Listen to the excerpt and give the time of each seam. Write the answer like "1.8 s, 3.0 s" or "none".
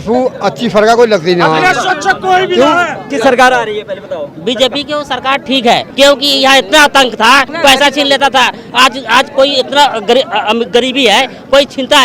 3.0 s, 5.9 s, 7.5 s